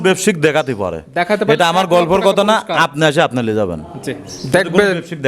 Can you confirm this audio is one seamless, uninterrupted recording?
yes; 0 cuts

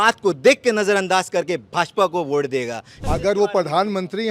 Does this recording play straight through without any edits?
no; 1 cut; at 2.9 s

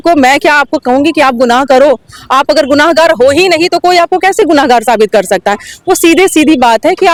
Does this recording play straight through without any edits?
yes; 0 cuts

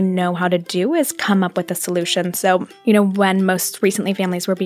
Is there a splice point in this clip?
yes; 1 cut; at 2.7 s

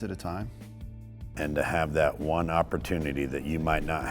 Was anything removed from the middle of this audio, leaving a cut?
yes; 1 cut; at 1.0 s

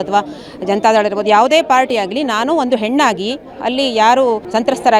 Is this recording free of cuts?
yes; 0 cuts

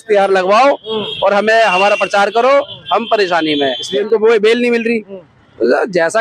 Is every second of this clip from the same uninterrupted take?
no; 1 cut; at 3.8 s

